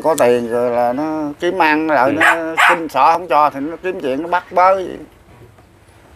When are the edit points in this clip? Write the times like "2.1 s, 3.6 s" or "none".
none